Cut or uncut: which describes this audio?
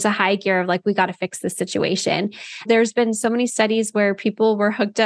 cut